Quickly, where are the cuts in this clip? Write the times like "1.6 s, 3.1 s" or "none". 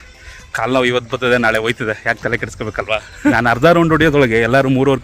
3.3 s